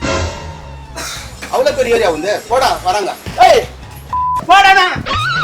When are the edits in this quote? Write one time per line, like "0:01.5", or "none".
0:03.2